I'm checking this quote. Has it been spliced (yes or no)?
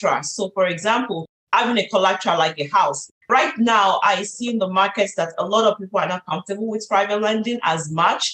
yes